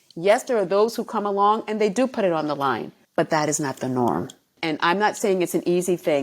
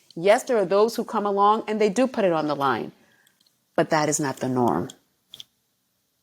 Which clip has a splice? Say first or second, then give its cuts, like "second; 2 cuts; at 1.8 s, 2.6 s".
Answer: first; 2 cuts; at 2.9 s, 4.6 s